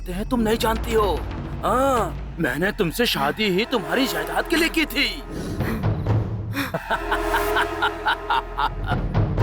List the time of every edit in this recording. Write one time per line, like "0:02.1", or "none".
0:06.7